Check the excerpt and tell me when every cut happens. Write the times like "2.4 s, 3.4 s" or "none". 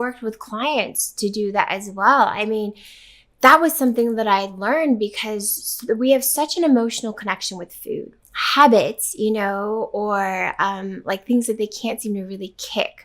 8.2 s